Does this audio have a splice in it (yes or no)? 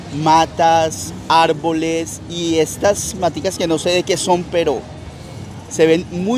no